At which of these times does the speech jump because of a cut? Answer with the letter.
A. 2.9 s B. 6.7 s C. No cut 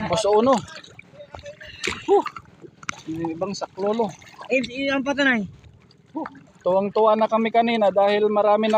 A